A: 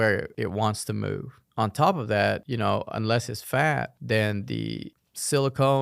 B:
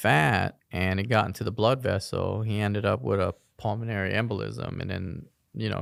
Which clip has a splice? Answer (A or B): A